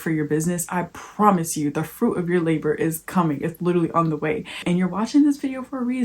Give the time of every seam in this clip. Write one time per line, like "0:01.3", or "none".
0:04.6

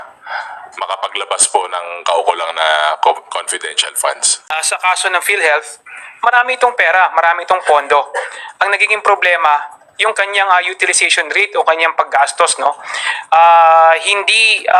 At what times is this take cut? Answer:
0:04.3

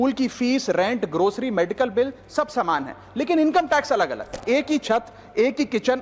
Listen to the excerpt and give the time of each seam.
0:04.4

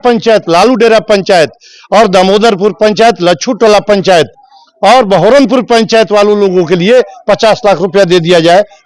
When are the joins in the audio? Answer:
none

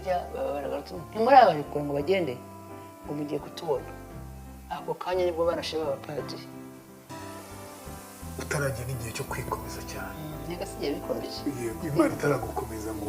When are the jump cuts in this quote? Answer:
0:07.1

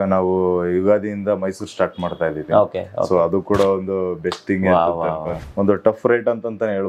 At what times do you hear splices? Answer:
0:05.4

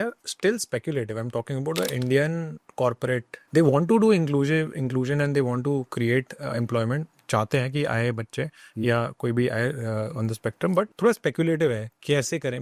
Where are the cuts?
0:03.3
0:10.9

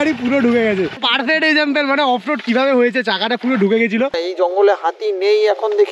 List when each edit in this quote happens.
0:00.9
0:04.2

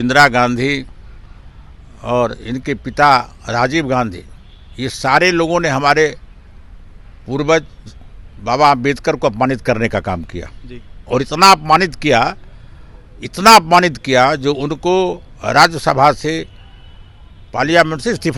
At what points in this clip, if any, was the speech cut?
none

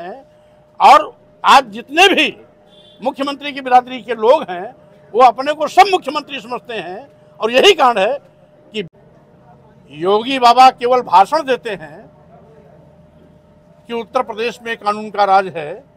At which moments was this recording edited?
0:08.9

